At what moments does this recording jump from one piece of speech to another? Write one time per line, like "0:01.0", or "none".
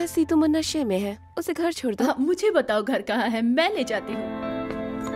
0:04.1